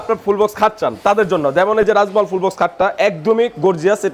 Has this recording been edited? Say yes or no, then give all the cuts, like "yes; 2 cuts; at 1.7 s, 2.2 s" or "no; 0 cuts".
no; 0 cuts